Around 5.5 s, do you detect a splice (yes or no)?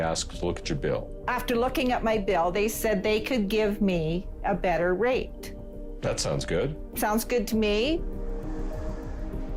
no